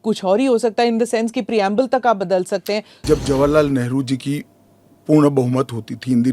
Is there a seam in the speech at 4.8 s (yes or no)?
no